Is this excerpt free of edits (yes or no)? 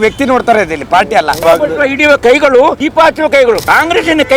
no